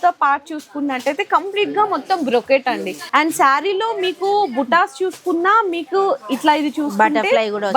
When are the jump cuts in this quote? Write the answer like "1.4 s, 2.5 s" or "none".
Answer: 3.0 s